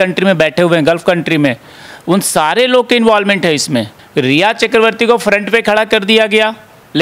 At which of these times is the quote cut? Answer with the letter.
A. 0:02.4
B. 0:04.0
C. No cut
B